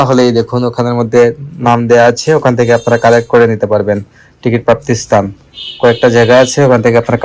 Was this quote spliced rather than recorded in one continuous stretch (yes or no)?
no